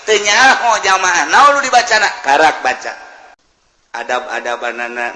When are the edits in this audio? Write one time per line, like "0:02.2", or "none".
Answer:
0:03.4